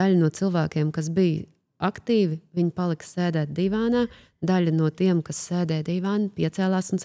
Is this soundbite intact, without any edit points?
yes; 0 cuts

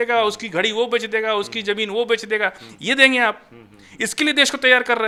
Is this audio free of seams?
yes; 0 cuts

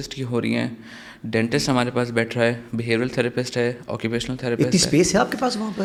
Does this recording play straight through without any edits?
yes; 0 cuts

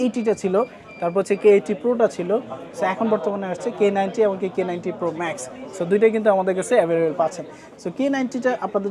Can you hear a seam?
no; 0 cuts

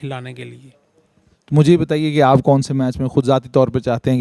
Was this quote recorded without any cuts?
yes; 0 cuts

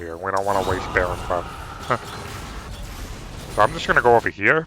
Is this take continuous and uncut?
no; 1 cut; at 2.7 s

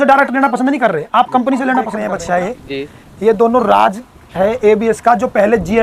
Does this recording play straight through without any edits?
no; 1 cut; at 2.1 s

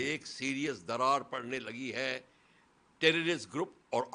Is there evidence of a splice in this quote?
no; 0 cuts

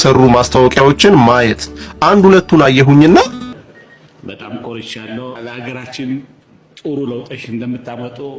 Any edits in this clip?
yes; 1 cut; at 3.4 s

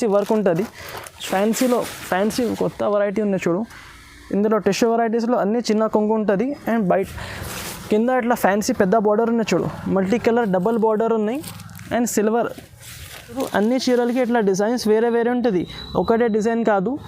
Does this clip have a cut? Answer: yes; 2 cuts; at 1.1 s, 13.4 s

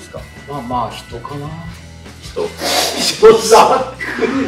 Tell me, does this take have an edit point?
no; 0 cuts

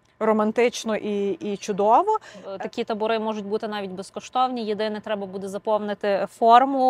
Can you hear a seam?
yes; 1 cut; at 2.5 s

